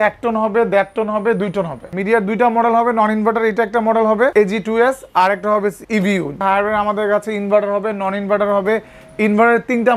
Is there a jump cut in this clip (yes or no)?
yes